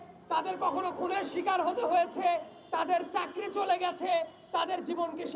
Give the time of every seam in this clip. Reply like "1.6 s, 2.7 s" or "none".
none

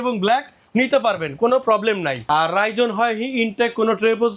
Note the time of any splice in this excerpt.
2.2 s

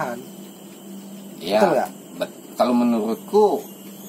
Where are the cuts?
none

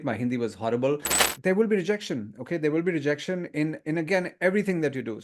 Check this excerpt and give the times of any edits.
1.3 s

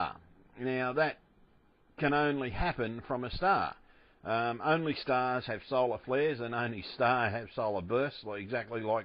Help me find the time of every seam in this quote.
6.4 s

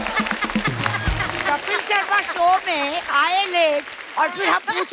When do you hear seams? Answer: 1.3 s

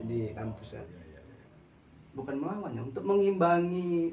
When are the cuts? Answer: 1.4 s

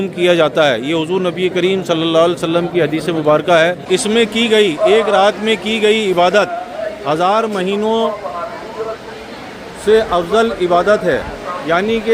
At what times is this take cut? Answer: 3.8 s

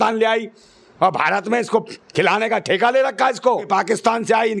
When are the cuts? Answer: 3.7 s

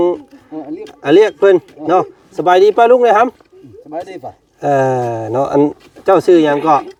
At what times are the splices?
none

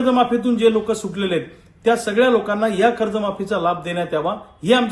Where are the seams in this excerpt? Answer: none

